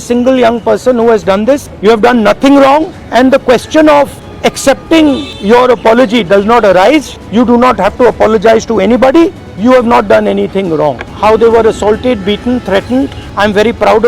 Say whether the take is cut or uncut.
cut